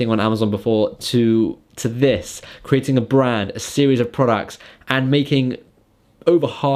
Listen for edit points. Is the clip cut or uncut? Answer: uncut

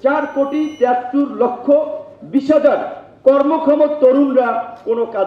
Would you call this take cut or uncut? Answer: uncut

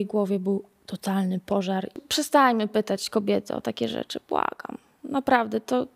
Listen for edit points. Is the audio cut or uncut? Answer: cut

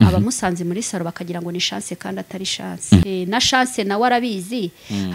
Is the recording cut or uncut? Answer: cut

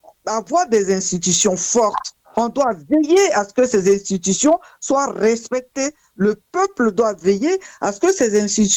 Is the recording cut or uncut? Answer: uncut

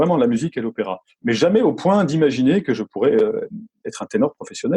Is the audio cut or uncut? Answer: uncut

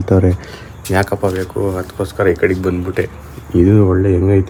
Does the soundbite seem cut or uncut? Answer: uncut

